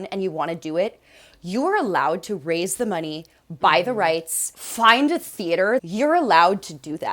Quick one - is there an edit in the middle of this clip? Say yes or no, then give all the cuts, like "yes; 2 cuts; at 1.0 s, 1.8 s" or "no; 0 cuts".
yes; 1 cut; at 5.8 s